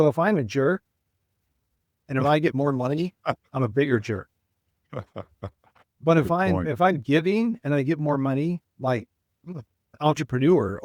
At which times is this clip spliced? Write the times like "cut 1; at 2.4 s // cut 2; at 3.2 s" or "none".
cut 1; at 9.8 s